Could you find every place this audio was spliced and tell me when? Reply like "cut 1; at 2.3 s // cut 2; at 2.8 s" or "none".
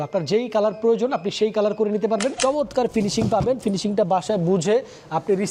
cut 1; at 2.4 s